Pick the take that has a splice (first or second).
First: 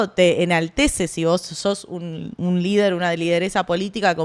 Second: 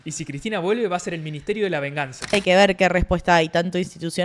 second